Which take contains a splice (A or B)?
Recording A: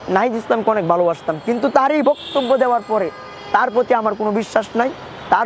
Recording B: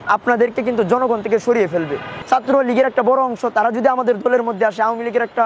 B